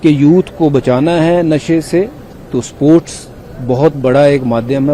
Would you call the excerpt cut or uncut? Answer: uncut